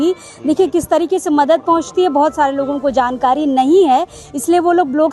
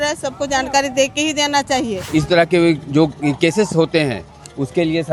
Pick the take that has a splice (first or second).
second